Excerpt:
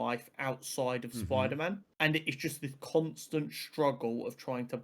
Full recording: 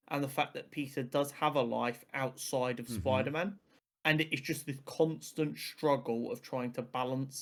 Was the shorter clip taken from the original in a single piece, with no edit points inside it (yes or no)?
no